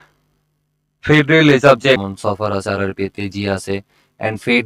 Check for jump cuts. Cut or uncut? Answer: cut